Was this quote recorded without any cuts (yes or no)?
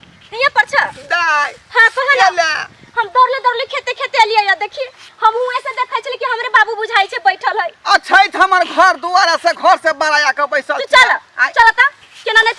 yes